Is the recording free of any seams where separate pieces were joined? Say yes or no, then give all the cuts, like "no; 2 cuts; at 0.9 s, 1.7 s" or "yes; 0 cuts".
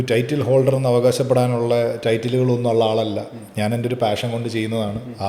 yes; 0 cuts